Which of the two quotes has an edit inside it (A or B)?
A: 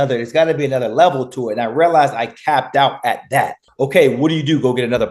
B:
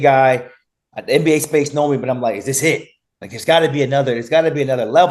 A